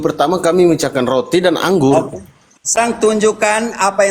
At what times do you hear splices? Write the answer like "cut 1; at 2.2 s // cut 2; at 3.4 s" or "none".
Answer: cut 1; at 2.8 s